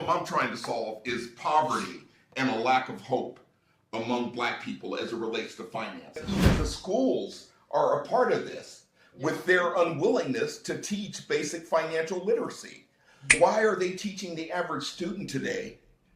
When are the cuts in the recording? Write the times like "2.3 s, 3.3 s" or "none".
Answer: 6.2 s, 13.3 s